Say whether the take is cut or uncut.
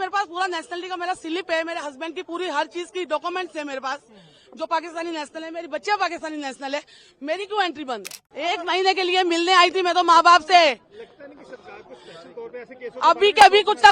cut